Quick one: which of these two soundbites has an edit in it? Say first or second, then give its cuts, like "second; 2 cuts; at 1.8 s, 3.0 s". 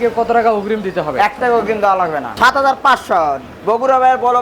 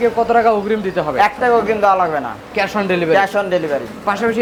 first; 1 cut; at 2.3 s